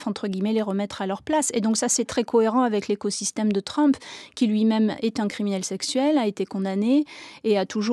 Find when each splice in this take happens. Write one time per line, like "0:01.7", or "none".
none

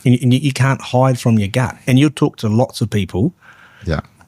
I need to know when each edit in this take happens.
0:01.8

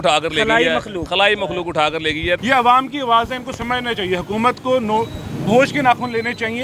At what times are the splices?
0:02.4

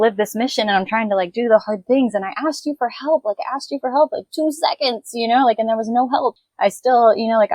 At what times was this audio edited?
0:06.4

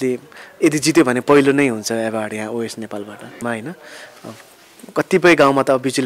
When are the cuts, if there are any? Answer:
0:03.4

